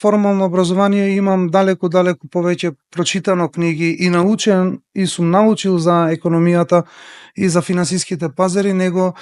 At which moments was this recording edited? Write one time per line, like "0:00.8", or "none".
none

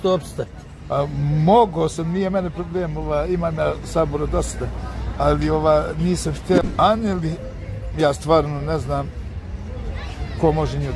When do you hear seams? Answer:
0:06.6

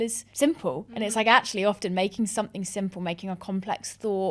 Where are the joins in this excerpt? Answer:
none

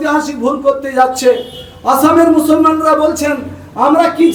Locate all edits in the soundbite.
none

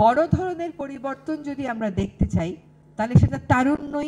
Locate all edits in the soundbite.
none

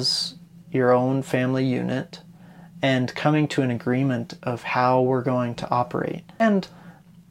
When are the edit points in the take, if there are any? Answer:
0:06.4

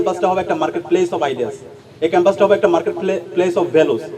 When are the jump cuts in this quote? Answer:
none

